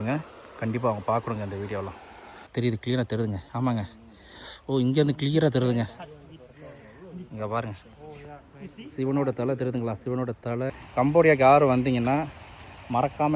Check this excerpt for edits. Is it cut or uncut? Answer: cut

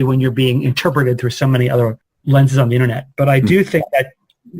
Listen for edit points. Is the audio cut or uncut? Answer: cut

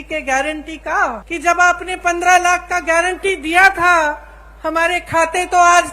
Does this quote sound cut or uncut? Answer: cut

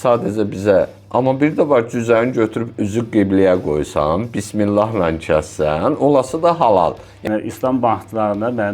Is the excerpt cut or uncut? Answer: cut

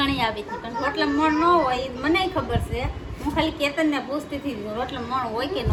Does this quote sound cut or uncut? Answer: uncut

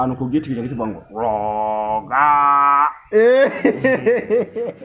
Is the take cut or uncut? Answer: uncut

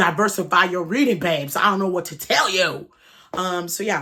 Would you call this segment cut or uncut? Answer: uncut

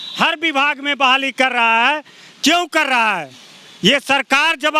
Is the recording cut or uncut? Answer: uncut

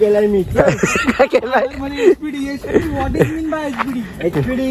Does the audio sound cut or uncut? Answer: uncut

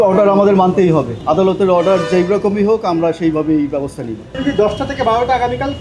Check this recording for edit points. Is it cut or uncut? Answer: cut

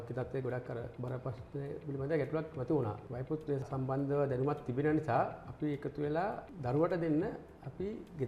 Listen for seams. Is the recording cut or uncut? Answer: uncut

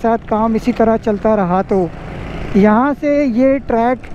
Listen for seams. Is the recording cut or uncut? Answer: uncut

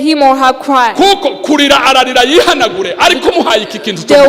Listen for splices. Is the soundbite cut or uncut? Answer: uncut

